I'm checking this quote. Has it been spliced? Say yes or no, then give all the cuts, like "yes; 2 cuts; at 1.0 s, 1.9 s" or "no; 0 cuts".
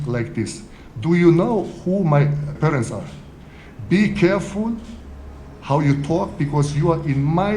yes; 1 cut; at 2.6 s